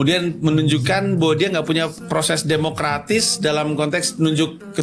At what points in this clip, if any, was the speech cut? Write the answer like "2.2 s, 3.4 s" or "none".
none